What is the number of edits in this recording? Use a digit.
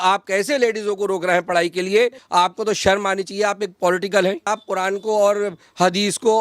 2